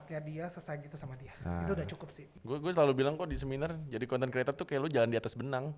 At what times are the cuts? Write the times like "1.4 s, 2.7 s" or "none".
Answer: 2.2 s